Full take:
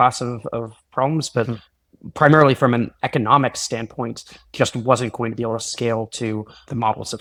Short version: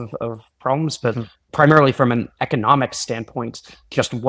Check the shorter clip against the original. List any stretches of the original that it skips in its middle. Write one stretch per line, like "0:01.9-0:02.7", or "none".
0:01.7-0:02.0